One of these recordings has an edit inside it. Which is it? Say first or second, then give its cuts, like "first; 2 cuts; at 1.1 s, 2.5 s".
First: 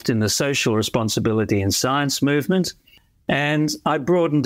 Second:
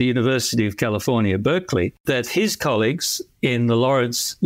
second; 1 cut; at 2.0 s